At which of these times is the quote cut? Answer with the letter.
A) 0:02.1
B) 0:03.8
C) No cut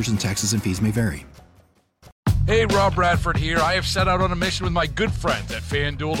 A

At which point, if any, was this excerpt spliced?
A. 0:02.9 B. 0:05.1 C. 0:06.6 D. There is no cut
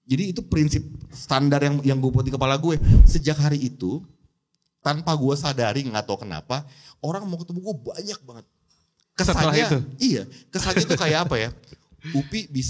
A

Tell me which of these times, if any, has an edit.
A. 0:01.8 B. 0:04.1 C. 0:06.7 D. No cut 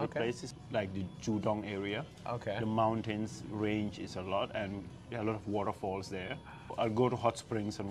C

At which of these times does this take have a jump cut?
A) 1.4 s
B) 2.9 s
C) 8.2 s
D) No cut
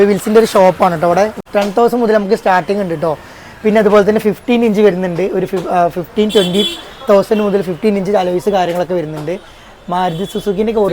A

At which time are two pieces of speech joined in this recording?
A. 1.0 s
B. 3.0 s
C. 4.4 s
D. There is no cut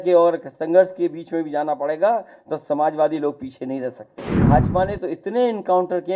C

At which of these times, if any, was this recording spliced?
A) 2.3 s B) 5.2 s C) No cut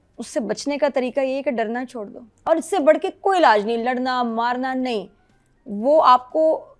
A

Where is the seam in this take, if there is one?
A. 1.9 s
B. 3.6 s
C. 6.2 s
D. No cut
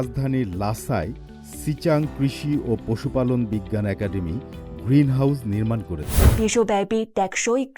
C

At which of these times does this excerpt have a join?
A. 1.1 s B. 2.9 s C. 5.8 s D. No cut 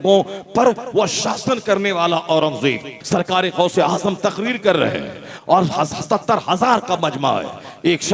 B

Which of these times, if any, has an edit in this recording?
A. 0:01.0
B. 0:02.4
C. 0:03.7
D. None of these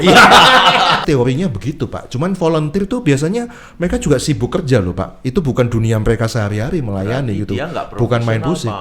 A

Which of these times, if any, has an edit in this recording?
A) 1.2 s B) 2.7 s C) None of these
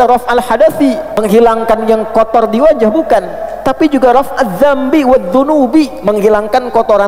A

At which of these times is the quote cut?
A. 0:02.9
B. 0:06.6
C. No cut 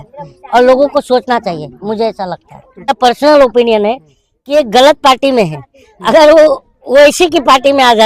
A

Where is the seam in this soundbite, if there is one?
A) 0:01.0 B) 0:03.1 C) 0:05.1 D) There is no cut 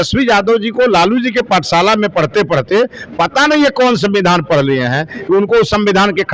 D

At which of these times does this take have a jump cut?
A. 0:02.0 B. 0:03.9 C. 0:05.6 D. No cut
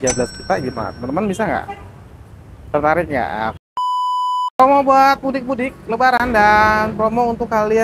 B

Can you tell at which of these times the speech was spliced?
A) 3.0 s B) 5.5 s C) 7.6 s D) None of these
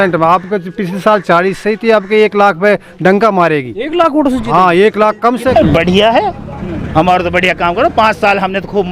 B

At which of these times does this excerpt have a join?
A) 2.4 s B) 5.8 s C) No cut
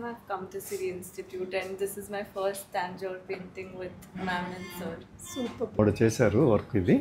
B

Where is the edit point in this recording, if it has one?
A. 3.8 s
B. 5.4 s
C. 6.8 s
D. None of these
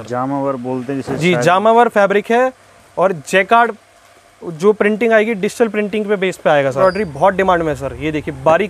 C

